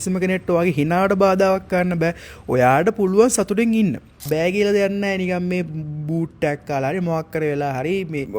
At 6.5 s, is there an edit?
no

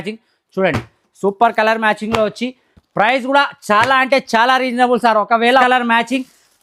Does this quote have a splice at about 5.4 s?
yes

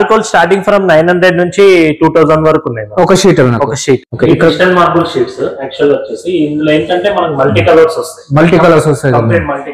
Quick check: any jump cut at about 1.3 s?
no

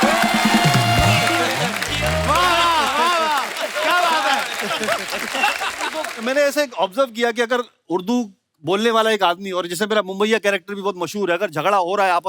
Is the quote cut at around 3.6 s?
no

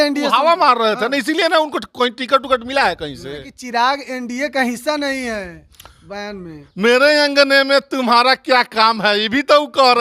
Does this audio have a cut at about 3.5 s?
yes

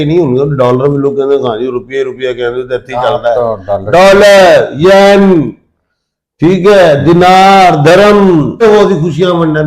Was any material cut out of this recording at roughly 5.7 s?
no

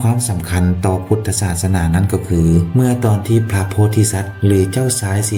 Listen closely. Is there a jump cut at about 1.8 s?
no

